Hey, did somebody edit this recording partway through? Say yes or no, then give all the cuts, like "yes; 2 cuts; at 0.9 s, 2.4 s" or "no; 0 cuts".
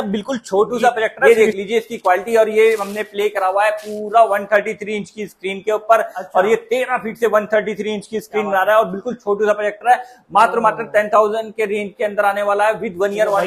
yes; 1 cut; at 1.2 s